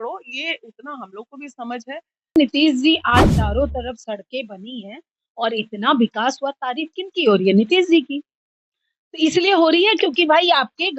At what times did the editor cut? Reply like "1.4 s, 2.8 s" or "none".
2.4 s